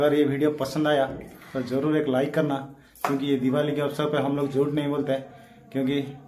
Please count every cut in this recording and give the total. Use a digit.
0